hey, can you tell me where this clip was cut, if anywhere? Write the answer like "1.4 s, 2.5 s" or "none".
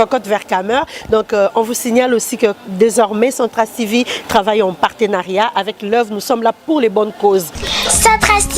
7.6 s